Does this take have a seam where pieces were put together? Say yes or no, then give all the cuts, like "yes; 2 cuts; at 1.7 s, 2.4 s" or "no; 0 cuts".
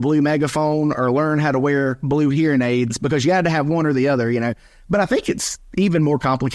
yes; 1 cut; at 5.6 s